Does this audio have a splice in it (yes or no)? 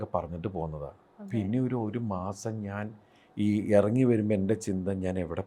no